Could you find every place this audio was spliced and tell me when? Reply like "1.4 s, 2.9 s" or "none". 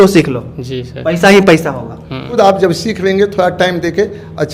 2.4 s